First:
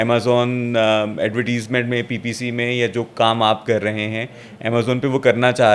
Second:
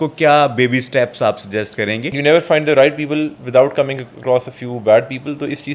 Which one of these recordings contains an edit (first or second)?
second